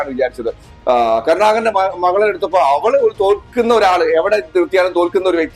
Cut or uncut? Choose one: uncut